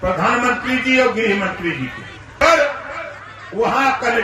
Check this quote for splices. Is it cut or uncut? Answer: cut